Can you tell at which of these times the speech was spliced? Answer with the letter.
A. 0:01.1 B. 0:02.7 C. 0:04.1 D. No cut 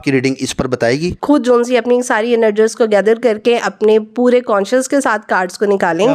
A